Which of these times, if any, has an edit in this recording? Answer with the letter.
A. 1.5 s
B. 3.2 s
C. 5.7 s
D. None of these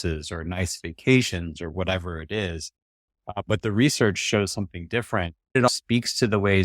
C